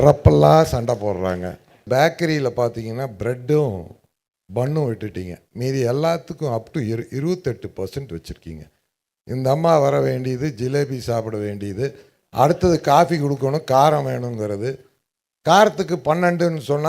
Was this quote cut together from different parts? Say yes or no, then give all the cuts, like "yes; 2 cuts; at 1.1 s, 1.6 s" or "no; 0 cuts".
yes; 1 cut; at 1.8 s